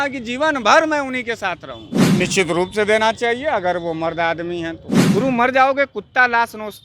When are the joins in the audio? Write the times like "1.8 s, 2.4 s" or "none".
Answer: 2.1 s, 4.9 s